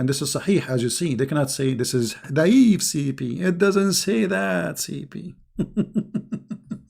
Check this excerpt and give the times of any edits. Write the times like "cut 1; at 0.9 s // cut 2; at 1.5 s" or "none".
cut 1; at 2.2 s